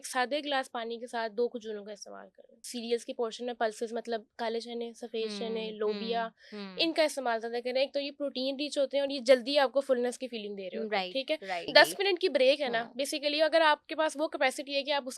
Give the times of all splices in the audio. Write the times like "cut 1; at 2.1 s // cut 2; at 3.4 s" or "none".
cut 1; at 2.7 s // cut 2; at 11.7 s